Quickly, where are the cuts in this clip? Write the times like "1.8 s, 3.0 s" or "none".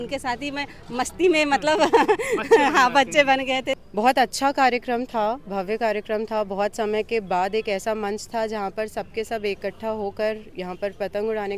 3.8 s